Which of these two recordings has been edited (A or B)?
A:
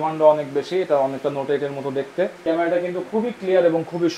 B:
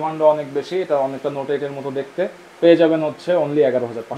A